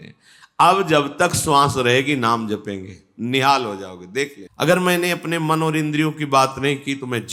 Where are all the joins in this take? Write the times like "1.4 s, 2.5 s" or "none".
4.4 s